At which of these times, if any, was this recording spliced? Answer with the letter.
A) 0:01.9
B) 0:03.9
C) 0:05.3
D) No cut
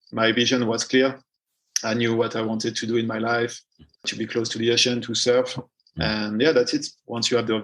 B